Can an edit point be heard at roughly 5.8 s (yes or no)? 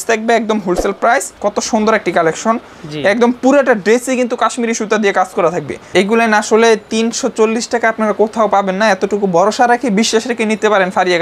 yes